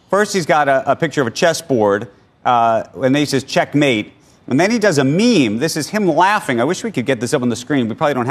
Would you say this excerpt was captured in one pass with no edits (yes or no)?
yes